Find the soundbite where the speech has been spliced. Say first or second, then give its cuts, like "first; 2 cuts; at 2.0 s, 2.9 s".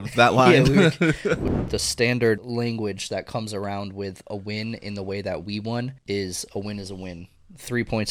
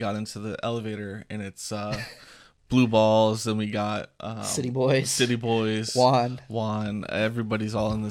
first; 3 cuts; at 1.4 s, 2.4 s, 6.0 s